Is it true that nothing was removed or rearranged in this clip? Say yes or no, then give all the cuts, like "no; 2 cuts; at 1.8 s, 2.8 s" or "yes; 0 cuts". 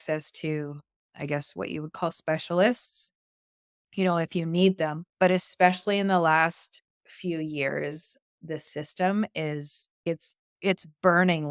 no; 3 cuts; at 5.0 s, 8.4 s, 10.0 s